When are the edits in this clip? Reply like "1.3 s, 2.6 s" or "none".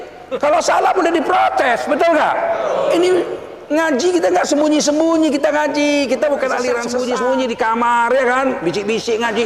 6.9 s

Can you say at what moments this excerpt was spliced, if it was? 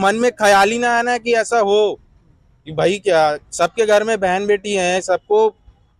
none

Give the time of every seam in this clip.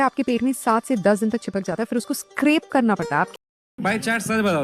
3.3 s

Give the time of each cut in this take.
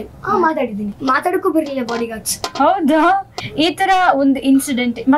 1.0 s, 3.4 s

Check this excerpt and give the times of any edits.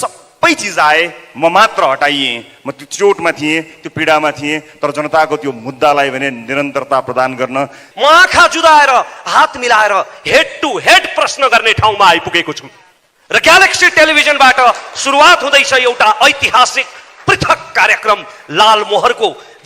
7.8 s

